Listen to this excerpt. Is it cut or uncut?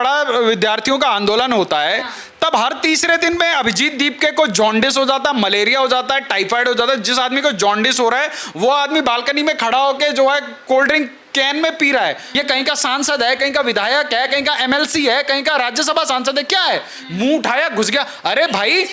cut